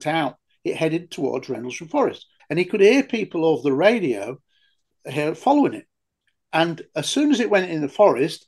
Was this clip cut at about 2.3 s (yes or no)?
yes